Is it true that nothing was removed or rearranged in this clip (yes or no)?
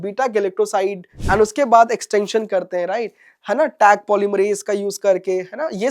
no